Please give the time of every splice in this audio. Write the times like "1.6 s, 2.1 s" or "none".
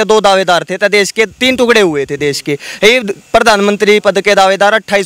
1.4 s